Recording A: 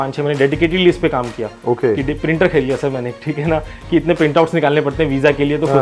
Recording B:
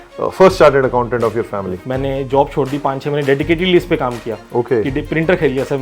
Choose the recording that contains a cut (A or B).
B